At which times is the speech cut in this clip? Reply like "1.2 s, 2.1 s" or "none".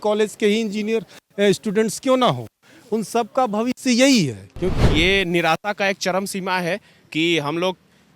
4.7 s